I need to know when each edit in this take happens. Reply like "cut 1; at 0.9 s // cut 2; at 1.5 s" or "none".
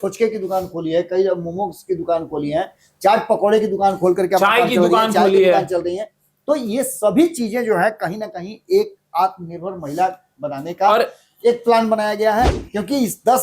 cut 1; at 12.5 s